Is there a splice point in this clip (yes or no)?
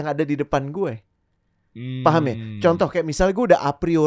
no